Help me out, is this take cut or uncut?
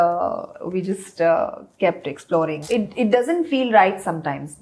cut